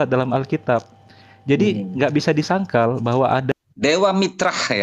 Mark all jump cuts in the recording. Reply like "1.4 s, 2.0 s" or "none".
3.5 s

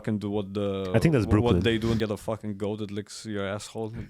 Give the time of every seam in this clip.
2.0 s

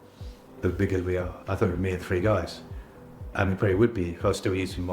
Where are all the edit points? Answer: 1.3 s

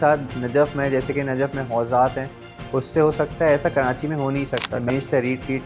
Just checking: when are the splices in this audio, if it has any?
4.7 s

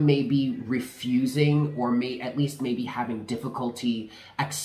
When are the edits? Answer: none

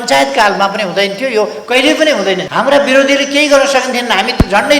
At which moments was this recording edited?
2.4 s

